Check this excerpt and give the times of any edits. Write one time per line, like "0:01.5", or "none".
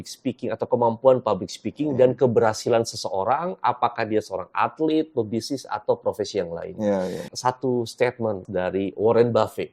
0:07.2
0:08.4